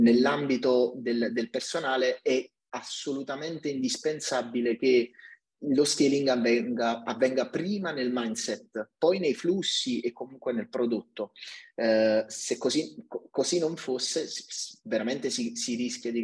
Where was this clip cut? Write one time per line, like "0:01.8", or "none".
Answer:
none